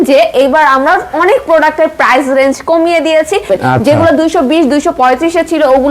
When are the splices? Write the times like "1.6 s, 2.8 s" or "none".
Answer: 3.5 s